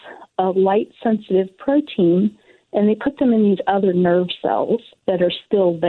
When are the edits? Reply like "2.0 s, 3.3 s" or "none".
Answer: 4.9 s